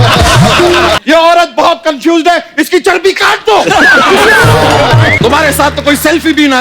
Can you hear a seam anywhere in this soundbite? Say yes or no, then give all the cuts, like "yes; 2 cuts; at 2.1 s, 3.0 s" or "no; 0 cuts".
yes; 2 cuts; at 1.0 s, 5.1 s